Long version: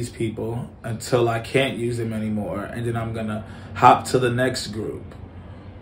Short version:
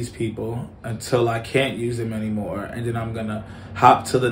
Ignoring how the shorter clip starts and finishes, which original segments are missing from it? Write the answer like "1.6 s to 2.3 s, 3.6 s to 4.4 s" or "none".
none